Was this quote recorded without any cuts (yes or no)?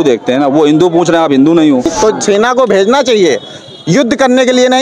no